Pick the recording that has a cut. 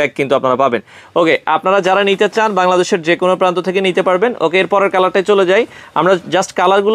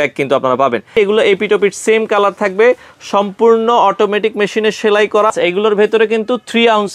second; 2 cuts; at 0.9 s, 5.3 s

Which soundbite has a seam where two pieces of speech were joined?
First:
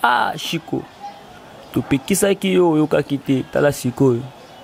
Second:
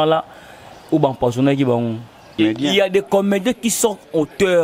second; 1 cut; at 2.4 s

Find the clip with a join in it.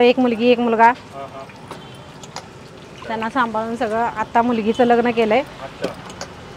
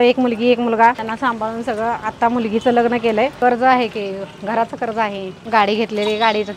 second; 3 cuts; at 1.0 s, 3.3 s, 5.4 s

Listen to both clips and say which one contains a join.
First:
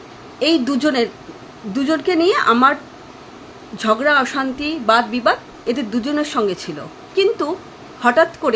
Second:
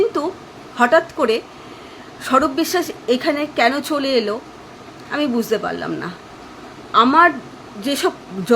second; 1 cut; at 6.2 s

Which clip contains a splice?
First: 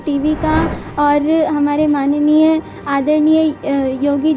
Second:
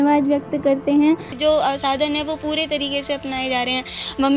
second; 1 cut; at 1.3 s

